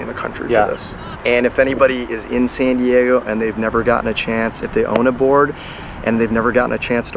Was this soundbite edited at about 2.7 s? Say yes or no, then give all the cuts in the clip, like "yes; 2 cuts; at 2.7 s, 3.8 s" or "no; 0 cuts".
no; 1 cut; at 1.0 s